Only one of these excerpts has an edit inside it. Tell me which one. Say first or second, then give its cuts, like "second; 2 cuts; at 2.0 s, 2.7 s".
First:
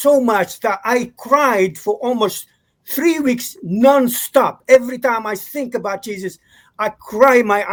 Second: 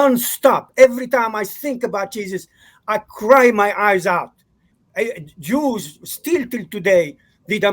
second; 1 cut; at 4.8 s